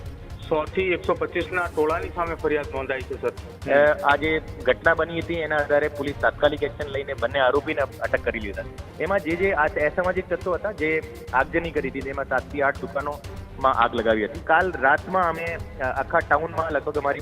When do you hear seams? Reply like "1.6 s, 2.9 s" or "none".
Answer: 3.5 s, 8.8 s, 14.4 s